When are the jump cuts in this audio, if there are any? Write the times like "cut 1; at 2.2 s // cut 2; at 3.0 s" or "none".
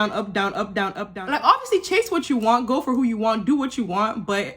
cut 1; at 1.1 s

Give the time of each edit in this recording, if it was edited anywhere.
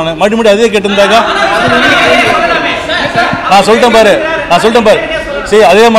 none

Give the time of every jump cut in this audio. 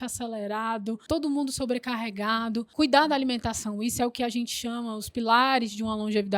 cut 1; at 1.0 s // cut 2; at 2.7 s

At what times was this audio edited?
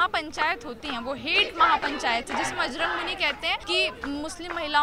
cut 1; at 3.6 s

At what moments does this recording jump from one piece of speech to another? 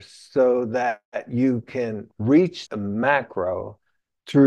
cut 1; at 2.6 s

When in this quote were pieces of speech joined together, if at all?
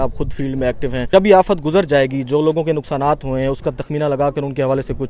cut 1; at 1.0 s

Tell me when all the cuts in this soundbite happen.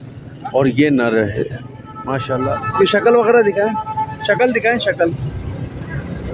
cut 1; at 2.5 s

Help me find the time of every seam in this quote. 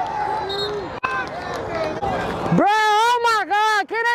cut 1; at 2.0 s

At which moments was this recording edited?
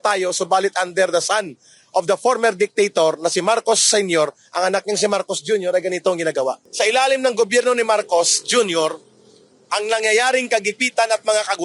cut 1; at 6.6 s

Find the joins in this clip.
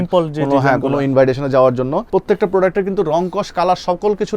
cut 1; at 2.1 s

